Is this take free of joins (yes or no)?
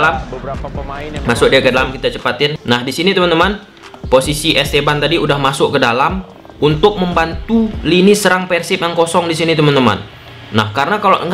yes